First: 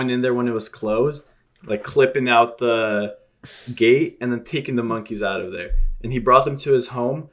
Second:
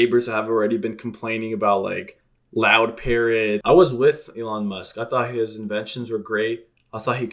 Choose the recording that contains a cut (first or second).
second